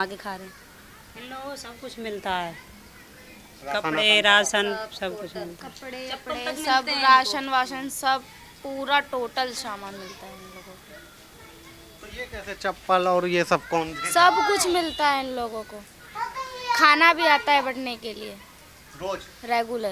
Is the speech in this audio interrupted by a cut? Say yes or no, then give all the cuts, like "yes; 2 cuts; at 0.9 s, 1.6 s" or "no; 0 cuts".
no; 0 cuts